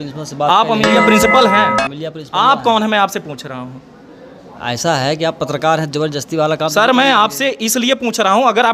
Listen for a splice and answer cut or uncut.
uncut